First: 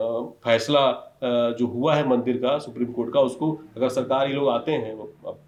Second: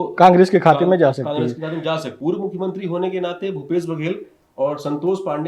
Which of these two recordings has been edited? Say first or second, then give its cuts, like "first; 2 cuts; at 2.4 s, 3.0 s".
second; 1 cut; at 2.1 s